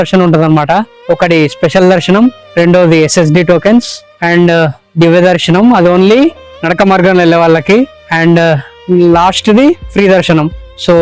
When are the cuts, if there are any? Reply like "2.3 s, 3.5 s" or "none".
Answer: none